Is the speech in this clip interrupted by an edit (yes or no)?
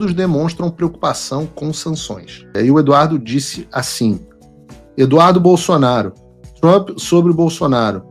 yes